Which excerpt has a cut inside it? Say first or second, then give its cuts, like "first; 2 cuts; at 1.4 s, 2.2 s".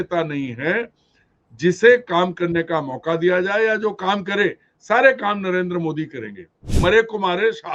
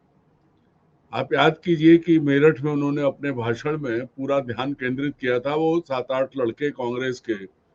first; 1 cut; at 6.6 s